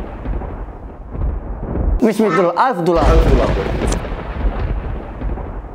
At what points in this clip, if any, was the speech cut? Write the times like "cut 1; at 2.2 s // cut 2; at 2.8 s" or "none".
cut 1; at 2.0 s